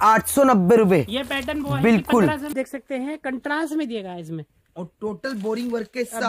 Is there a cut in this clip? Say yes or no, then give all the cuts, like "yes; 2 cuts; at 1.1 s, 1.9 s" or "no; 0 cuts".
yes; 1 cut; at 2.5 s